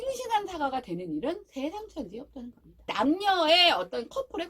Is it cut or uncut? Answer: cut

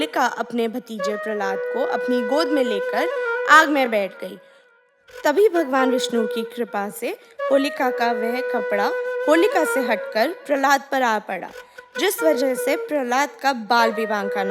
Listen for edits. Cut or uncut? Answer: uncut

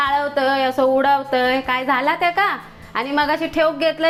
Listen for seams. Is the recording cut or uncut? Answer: uncut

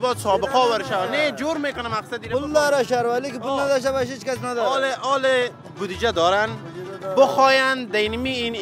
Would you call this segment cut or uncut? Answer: uncut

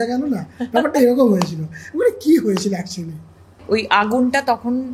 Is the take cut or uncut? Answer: cut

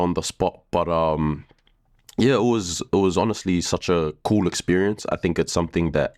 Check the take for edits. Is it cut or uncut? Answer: uncut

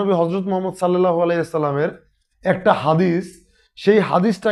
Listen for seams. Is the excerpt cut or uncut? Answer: uncut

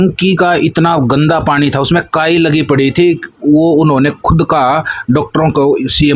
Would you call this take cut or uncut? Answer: uncut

